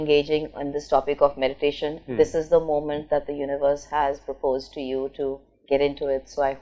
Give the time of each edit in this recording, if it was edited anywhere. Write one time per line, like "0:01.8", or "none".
none